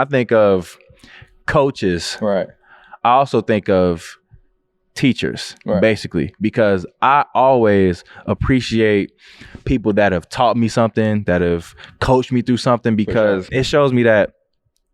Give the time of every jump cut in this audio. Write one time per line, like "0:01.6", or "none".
0:13.5

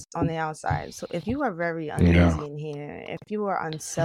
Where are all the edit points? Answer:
none

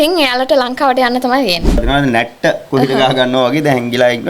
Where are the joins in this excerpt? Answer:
0:01.8

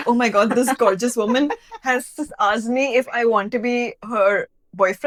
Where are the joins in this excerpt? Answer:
none

